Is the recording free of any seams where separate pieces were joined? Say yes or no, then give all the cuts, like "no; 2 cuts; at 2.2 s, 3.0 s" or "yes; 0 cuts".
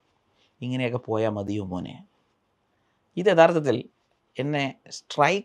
yes; 0 cuts